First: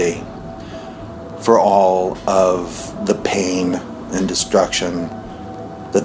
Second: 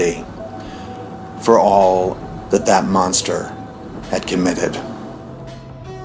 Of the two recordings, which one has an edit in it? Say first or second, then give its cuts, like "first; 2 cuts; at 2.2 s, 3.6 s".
second; 2 cuts; at 2.2 s, 5.0 s